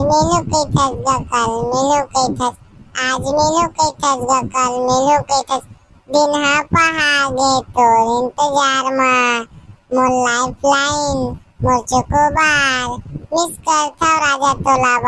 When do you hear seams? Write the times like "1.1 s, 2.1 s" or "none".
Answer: none